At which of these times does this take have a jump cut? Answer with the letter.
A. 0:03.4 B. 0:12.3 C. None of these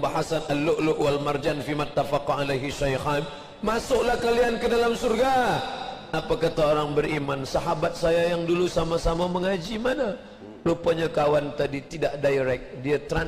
C